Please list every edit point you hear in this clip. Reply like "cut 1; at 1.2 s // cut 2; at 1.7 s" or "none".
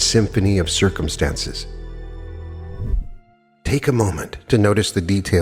cut 1; at 2.9 s

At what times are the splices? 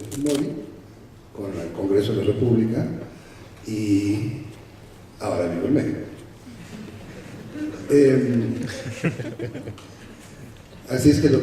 cut 1; at 6.0 s

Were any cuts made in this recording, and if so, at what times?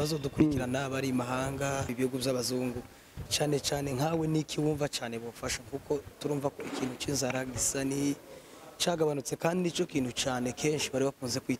cut 1; at 1.9 s

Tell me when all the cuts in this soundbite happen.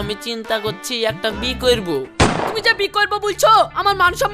cut 1; at 2.2 s

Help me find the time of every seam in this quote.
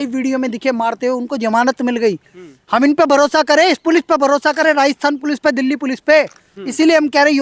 none

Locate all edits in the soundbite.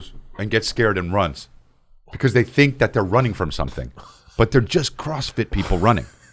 none

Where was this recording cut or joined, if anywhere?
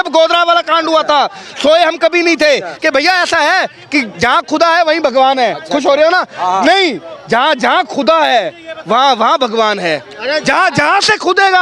cut 1; at 2.7 s

